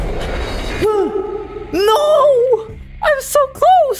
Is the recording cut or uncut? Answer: uncut